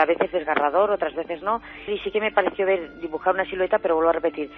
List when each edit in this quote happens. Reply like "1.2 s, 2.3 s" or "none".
1.7 s